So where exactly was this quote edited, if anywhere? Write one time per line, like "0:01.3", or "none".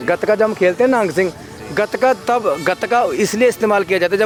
none

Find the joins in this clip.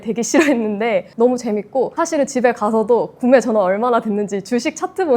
0:01.1
0:01.9

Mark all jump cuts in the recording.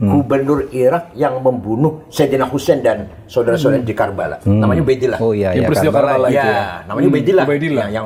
none

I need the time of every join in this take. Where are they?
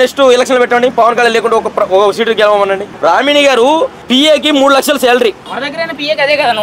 0:02.9
0:04.0
0:05.5

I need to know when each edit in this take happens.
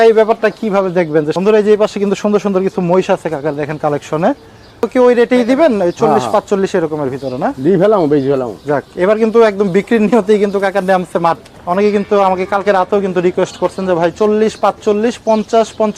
0:01.3
0:04.8
0:11.4

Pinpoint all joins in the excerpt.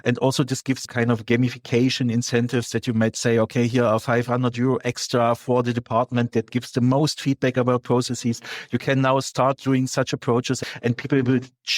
0:00.9
0:10.6

